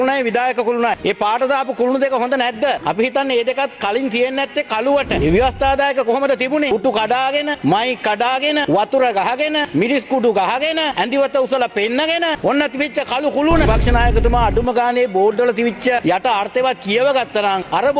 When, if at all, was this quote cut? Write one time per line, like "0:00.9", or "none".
0:05.1
0:06.7
0:09.7
0:13.6